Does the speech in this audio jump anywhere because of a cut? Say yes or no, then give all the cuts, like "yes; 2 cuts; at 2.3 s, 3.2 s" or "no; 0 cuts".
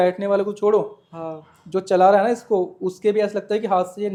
no; 0 cuts